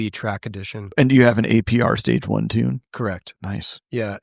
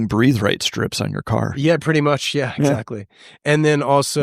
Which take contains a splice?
first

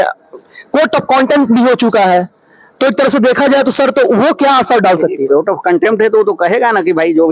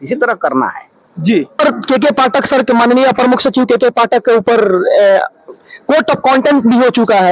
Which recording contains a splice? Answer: second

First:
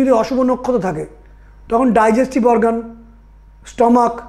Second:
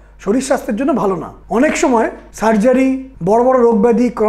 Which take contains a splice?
second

